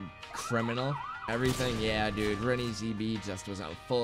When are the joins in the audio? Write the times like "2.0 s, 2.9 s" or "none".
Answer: 1.2 s

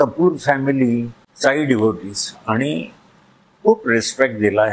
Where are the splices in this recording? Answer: 1.2 s

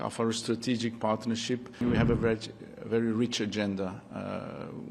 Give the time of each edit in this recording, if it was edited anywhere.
1.8 s

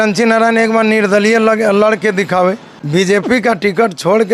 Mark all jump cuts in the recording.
2.7 s

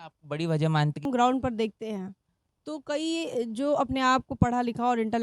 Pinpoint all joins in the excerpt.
1.0 s

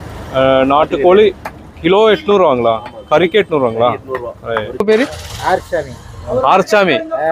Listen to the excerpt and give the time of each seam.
4.8 s

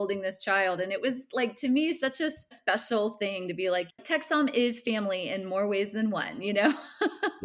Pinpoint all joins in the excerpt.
2.6 s, 3.9 s

